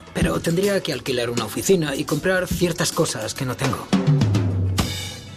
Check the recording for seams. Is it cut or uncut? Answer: uncut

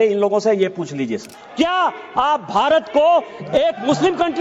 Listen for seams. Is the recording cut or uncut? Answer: cut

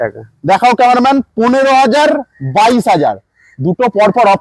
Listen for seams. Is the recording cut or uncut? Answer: uncut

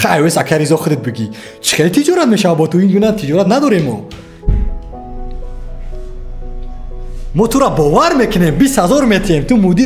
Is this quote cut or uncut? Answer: uncut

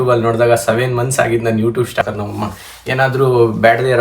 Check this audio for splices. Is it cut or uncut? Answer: cut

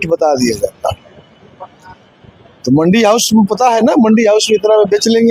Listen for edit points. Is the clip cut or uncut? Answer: uncut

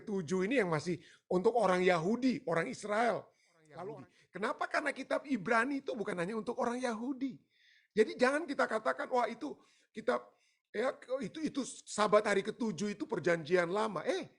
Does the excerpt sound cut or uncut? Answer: cut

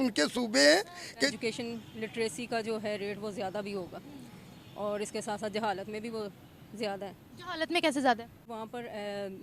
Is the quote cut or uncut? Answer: cut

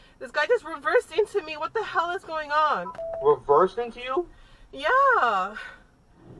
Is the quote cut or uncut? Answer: cut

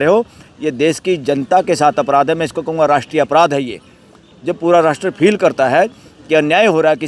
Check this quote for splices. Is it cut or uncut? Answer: uncut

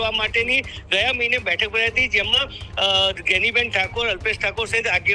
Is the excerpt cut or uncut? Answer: uncut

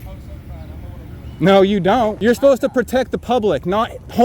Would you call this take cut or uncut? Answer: cut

